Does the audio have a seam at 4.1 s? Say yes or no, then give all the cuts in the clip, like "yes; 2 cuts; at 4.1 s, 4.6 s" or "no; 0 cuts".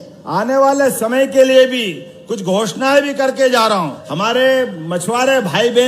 yes; 1 cut; at 4.1 s